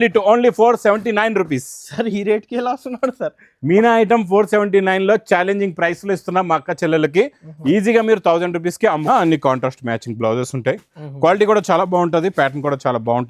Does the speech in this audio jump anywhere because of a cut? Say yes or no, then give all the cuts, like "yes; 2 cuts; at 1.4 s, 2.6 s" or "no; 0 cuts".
yes; 1 cut; at 9.0 s